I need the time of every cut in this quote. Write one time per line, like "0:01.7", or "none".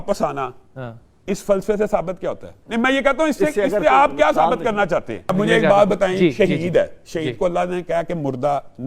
0:02.5
0:05.3